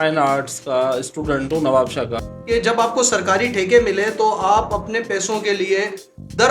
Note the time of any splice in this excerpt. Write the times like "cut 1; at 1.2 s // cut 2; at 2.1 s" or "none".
cut 1; at 2.2 s